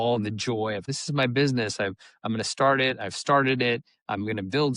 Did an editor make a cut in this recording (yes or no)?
yes